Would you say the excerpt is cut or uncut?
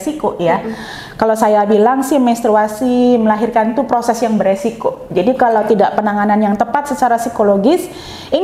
uncut